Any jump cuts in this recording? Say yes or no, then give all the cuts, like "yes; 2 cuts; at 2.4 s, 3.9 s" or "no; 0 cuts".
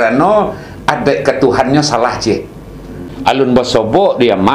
yes; 1 cut; at 2.9 s